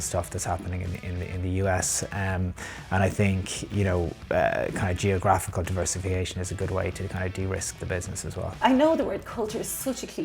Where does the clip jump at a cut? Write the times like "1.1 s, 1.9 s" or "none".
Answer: 8.6 s